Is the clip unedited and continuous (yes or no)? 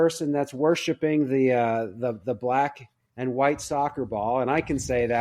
yes